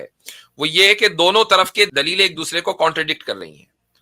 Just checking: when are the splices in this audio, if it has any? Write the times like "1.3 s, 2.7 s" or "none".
1.9 s